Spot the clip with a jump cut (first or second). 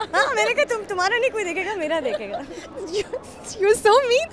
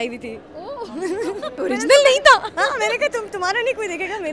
second